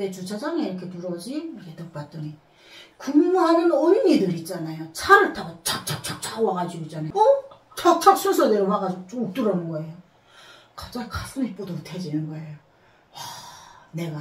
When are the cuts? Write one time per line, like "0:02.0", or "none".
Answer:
none